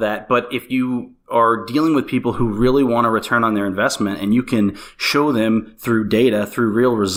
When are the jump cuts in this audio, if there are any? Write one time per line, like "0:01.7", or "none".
none